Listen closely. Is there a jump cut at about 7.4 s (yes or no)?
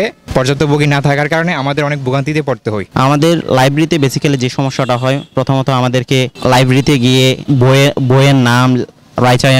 yes